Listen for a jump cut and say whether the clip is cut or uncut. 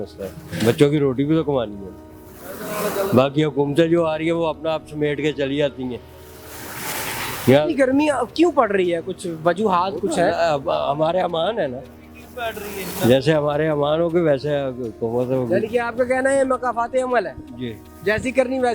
uncut